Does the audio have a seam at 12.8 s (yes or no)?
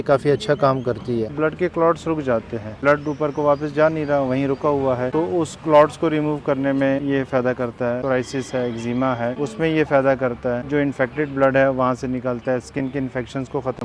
no